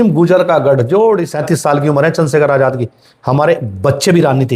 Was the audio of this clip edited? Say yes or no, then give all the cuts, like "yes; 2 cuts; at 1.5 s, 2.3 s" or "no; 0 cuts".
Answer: yes; 1 cut; at 1.3 s